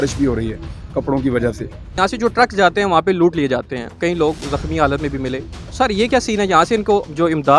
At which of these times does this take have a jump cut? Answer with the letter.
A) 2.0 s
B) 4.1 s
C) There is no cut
A